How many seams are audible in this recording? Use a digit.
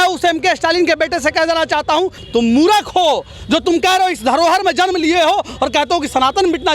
1